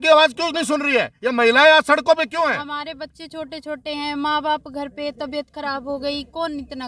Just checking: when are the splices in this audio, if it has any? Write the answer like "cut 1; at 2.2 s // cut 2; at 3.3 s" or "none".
none